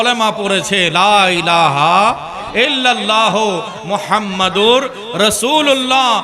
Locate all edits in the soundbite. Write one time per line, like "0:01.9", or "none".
none